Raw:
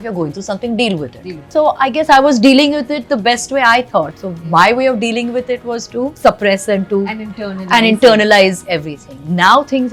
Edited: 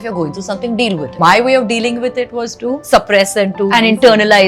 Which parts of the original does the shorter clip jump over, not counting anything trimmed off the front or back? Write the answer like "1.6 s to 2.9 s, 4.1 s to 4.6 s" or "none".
1.1 s to 4.4 s, 7.0 s to 7.7 s

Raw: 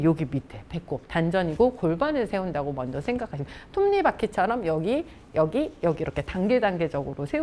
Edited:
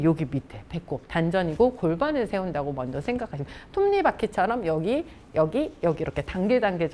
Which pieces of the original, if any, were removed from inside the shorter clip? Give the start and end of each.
none

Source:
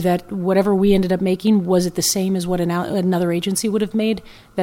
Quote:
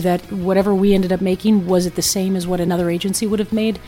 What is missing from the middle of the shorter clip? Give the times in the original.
2.7 s to 3.1 s

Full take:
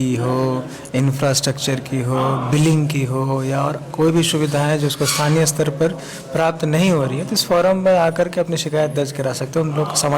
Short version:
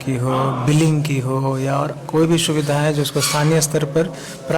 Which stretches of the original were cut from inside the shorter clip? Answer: none

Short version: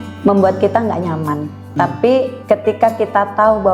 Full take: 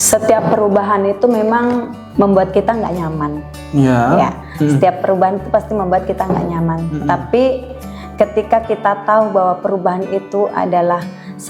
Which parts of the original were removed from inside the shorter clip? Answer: 3.6 s to 6.9 s, 7.7 s to 8.1 s

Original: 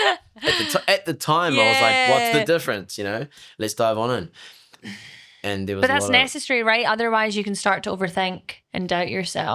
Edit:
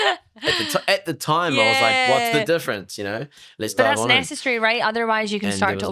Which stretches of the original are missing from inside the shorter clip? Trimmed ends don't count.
4.3 s to 6.3 s

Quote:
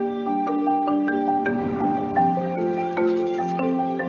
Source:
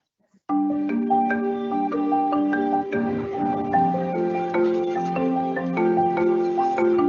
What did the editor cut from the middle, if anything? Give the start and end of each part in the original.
3.0 s to 3.2 s

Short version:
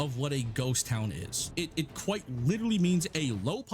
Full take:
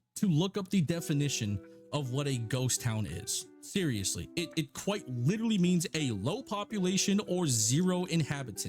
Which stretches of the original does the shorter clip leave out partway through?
3.3 s to 4.2 s

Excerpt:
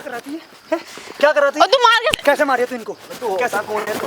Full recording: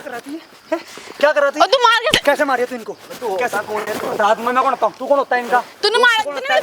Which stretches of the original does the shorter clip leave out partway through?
none

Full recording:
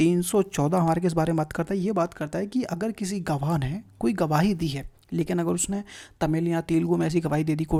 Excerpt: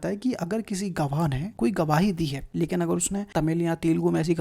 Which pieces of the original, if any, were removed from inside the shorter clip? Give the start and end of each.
3.8 s to 3.9 s, 4.8 s to 5.0 s, 5.8 s to 6.1 s

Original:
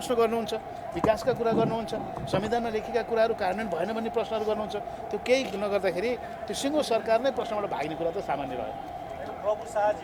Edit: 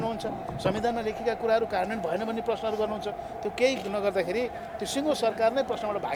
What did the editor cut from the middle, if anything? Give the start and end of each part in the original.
none

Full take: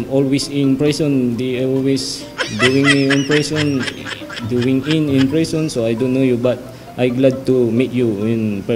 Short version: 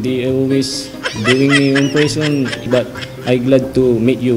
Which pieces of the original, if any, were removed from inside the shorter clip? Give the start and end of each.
4.0 s to 6.4 s

